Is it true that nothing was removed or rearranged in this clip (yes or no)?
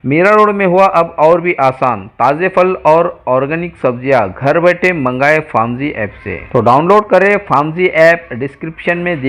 yes